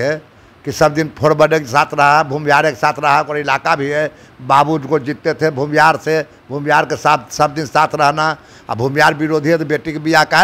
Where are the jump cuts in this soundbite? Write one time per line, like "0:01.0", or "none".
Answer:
none